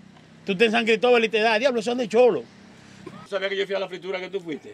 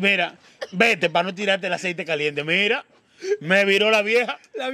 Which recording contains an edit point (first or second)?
first